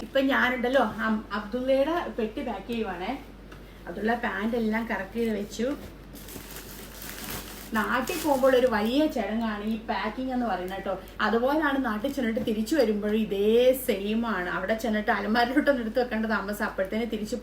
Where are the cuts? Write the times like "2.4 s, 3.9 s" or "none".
none